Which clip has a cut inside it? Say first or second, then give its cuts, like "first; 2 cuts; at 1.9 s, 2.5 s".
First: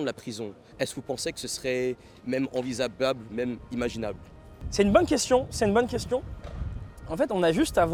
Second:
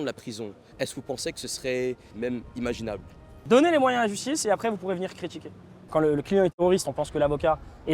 second; 3 cuts; at 2.1 s, 3.3 s, 5.9 s